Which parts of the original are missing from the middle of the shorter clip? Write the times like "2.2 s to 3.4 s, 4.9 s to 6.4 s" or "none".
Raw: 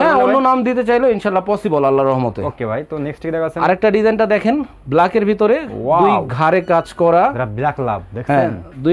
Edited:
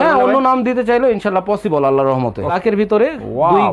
2.6 s to 5.1 s